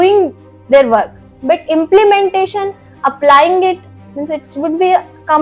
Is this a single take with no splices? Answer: yes; 0 cuts

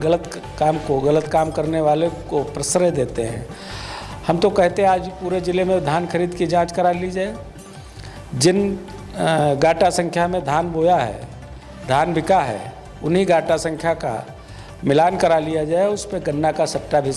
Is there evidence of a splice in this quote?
no; 0 cuts

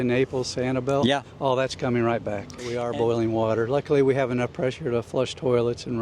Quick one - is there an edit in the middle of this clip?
yes; 1 cut; at 2.7 s

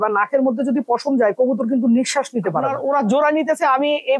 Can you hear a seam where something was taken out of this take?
yes; 1 cut; at 2.7 s

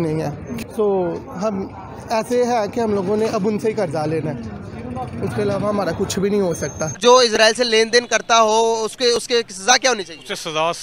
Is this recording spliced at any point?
yes; 1 cut; at 6.9 s

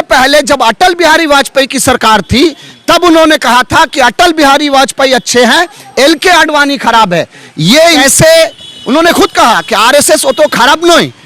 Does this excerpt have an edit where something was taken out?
yes; 1 cut; at 8.0 s

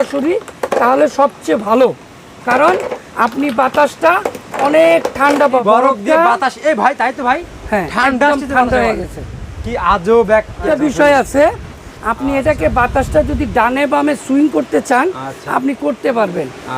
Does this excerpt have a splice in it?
yes; 2 cuts; at 5.6 s, 10.6 s

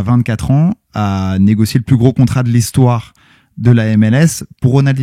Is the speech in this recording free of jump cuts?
yes; 0 cuts

